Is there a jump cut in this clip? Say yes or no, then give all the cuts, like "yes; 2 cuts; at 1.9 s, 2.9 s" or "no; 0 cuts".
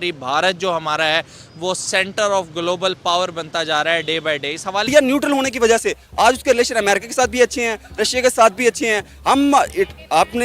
yes; 1 cut; at 4.9 s